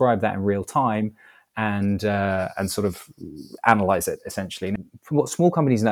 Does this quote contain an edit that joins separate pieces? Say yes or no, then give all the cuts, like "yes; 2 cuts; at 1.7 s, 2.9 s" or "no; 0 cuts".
yes; 1 cut; at 4.6 s